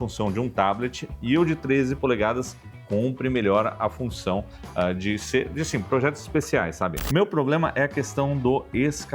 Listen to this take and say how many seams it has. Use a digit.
1